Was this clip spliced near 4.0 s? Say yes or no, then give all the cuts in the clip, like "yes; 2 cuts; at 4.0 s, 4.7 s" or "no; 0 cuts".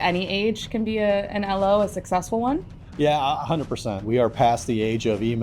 yes; 2 cuts; at 2.7 s, 4.0 s